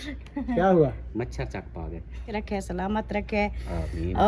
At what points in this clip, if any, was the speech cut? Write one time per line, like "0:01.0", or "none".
0:02.3

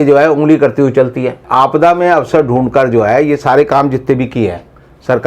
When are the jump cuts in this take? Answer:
0:01.4

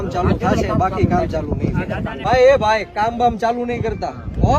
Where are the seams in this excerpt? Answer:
0:02.3

